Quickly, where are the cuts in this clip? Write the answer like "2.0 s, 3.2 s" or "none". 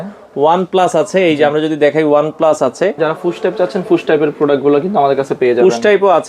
3.0 s